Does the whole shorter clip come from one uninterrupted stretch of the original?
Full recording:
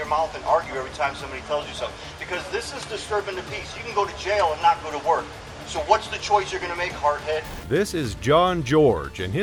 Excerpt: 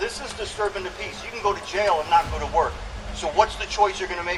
yes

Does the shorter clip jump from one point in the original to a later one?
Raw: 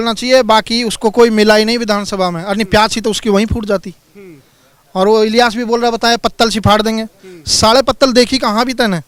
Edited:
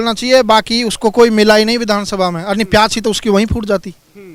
no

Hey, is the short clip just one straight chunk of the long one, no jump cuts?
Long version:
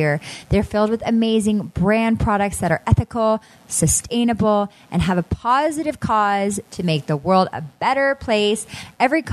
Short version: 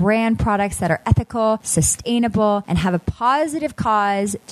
no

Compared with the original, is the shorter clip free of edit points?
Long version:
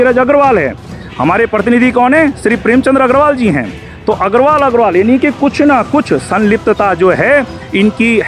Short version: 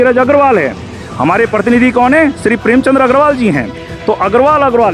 yes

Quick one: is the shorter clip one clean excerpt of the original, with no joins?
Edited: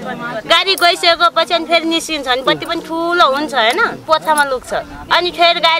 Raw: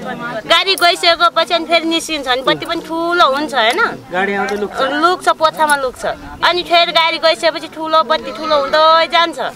no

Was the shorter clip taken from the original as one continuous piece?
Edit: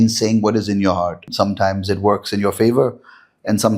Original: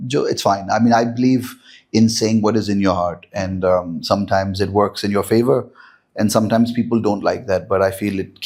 no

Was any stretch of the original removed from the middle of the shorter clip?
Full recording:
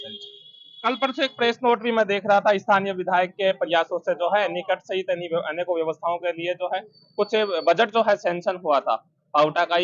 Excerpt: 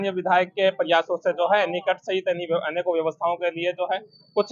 no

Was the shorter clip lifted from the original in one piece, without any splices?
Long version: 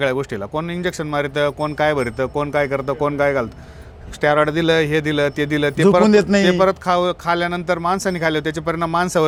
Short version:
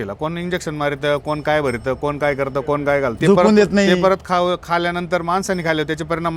no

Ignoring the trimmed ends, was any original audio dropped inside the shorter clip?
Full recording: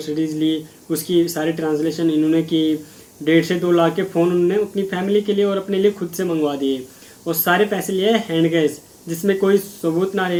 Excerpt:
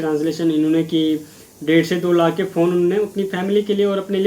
no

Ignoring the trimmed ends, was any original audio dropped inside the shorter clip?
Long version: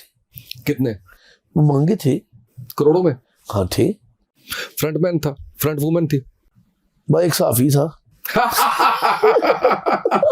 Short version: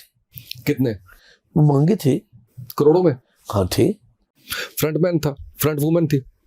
no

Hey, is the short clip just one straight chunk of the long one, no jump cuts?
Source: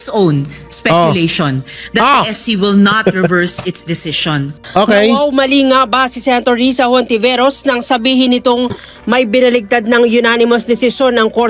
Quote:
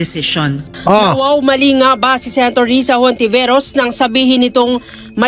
yes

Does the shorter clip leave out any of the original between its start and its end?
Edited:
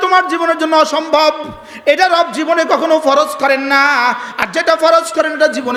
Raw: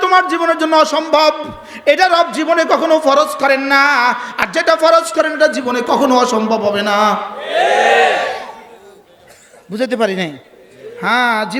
no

